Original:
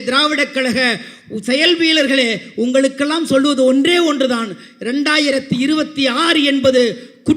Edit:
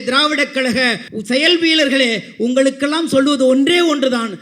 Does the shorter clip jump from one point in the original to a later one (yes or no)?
yes